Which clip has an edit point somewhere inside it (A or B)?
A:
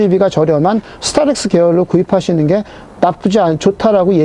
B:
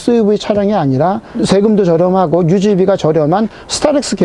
B